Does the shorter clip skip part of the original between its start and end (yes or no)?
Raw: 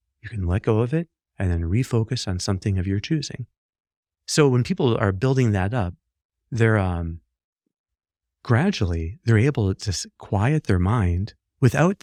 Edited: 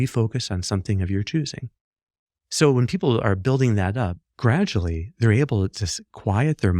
yes